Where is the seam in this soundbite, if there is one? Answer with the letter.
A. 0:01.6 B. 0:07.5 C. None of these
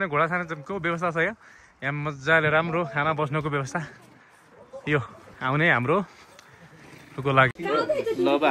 B